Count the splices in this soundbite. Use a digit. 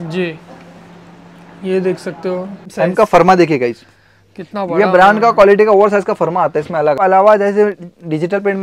2